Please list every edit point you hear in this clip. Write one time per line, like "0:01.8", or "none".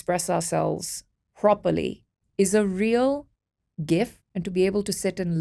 0:04.3